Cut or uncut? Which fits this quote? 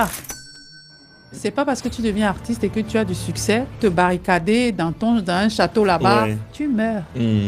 uncut